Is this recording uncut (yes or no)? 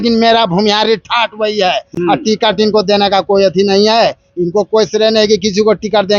yes